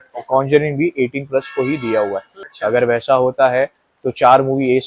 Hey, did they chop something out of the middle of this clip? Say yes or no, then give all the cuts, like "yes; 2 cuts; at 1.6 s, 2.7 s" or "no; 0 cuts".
yes; 1 cut; at 2.4 s